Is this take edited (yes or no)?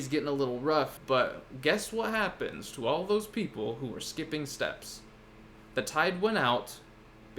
yes